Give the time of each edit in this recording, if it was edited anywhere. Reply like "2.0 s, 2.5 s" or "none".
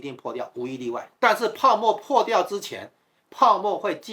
1.0 s